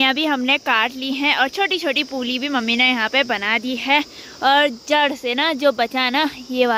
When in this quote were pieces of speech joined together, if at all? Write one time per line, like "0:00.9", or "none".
none